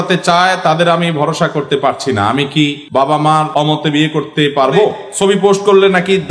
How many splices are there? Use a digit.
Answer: 3